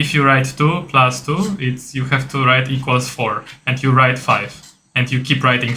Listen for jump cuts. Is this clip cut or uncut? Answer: uncut